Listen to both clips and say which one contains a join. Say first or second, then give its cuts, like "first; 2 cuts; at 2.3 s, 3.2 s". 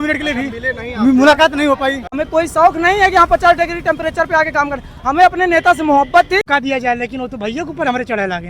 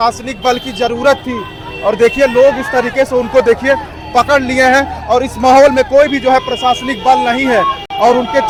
first; 2 cuts; at 2.1 s, 6.5 s